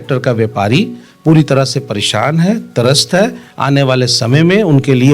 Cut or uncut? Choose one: uncut